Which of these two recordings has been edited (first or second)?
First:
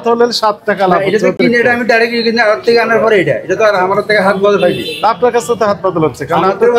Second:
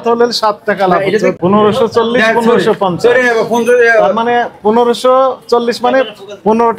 second